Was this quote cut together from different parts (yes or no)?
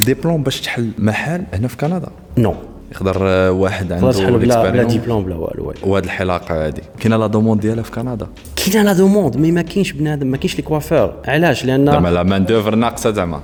no